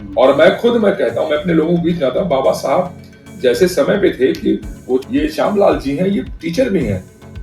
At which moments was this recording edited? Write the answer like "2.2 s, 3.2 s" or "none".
5.0 s